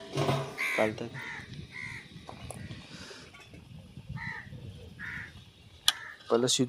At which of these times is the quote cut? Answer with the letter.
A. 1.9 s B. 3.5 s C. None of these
C